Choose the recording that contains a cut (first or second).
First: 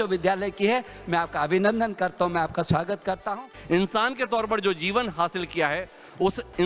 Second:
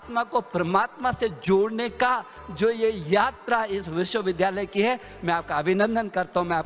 first